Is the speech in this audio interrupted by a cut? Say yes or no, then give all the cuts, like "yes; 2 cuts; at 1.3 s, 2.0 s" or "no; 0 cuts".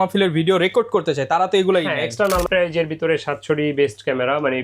yes; 1 cut; at 2.5 s